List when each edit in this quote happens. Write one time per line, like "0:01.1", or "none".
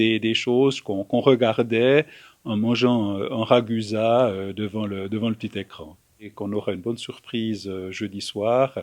0:06.3